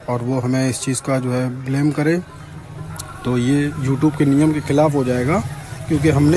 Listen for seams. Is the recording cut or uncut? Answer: uncut